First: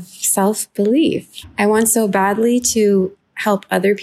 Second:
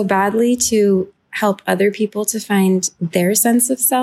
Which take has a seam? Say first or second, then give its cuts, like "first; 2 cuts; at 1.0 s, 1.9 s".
second; 1 cut; at 3.0 s